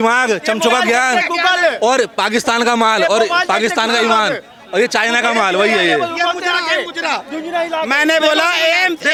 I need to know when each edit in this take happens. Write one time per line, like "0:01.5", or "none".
none